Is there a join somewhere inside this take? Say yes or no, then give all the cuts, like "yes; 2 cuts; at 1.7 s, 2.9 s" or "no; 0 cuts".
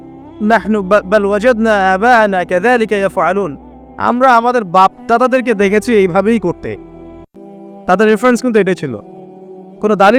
no; 0 cuts